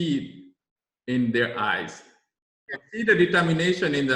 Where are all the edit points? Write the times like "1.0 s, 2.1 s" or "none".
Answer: 2.7 s